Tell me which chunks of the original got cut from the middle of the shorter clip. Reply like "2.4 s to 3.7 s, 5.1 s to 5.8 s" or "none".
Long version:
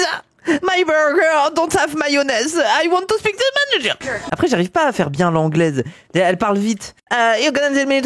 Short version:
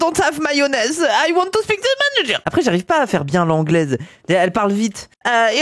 4.0 s to 4.3 s